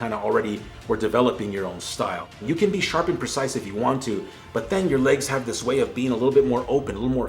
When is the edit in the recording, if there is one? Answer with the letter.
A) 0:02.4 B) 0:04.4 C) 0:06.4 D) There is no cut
A